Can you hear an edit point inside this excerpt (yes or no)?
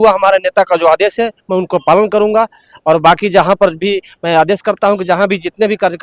no